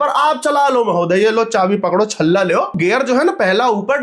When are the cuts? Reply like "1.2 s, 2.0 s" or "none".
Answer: 2.7 s